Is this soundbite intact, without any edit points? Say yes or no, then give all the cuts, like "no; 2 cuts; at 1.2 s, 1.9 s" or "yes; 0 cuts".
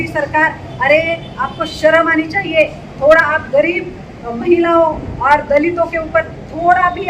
yes; 0 cuts